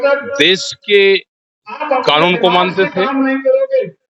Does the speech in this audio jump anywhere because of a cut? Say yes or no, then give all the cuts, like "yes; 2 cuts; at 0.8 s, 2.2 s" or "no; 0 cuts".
no; 0 cuts